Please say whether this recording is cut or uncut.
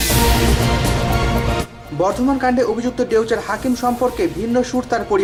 uncut